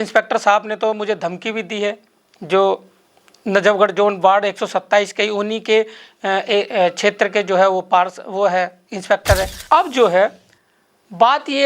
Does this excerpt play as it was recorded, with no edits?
no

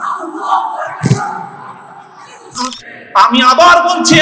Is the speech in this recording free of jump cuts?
no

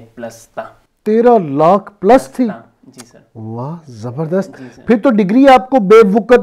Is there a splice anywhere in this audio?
no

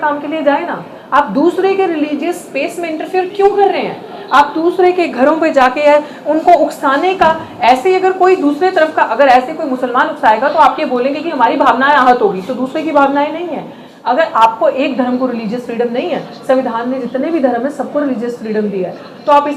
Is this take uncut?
yes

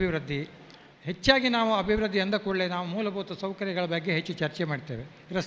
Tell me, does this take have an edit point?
yes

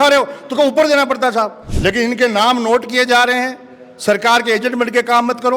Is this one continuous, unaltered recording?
no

